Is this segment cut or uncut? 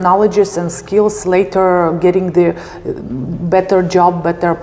uncut